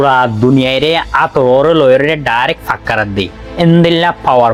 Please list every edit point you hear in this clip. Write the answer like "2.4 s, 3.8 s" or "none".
none